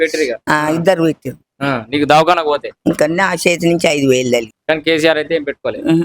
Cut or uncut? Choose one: cut